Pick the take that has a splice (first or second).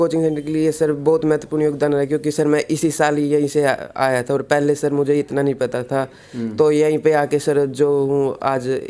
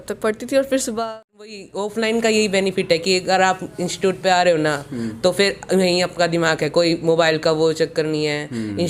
second